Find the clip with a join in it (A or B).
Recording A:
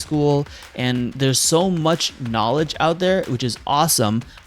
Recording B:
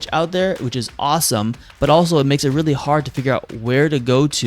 A